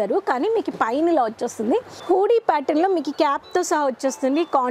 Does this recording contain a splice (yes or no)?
yes